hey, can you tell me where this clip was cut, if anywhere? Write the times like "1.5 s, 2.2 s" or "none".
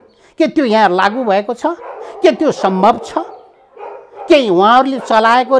none